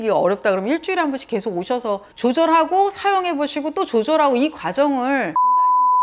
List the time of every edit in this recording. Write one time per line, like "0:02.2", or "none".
none